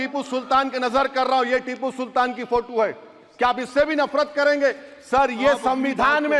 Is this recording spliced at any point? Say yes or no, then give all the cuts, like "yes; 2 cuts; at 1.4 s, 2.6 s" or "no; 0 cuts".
no; 0 cuts